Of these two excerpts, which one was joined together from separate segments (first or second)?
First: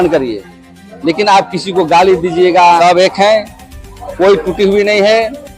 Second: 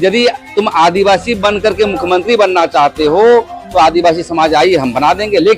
first